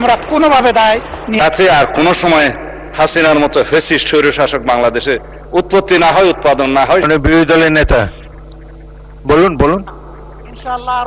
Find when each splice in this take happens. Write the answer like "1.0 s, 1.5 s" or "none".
1.4 s, 7.1 s